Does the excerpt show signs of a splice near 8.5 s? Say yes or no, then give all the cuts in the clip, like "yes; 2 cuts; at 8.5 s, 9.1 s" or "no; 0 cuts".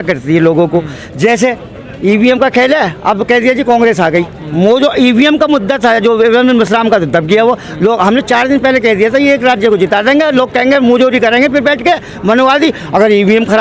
no; 0 cuts